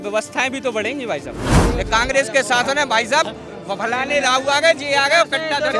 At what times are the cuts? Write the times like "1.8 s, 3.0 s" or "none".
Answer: 1.6 s